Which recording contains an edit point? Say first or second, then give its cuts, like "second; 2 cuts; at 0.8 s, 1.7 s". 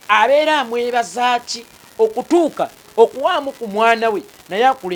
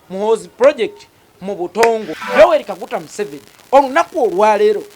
second; 1 cut; at 2.1 s